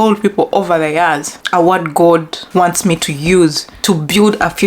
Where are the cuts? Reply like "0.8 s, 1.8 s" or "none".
1.3 s, 2.4 s, 3.7 s